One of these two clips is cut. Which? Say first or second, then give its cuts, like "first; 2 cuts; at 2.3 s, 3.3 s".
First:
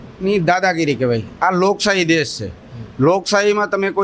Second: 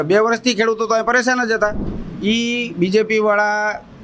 second; 1 cut; at 1.9 s